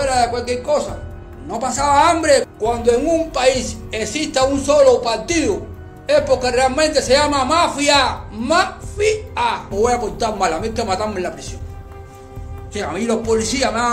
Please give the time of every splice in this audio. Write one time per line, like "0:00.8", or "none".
0:02.5
0:09.7